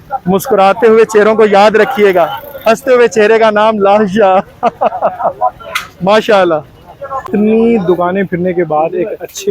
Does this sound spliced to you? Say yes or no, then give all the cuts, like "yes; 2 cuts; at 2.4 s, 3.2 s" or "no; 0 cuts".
no; 0 cuts